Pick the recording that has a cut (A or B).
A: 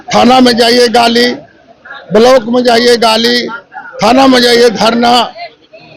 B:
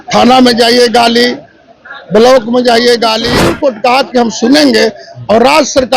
B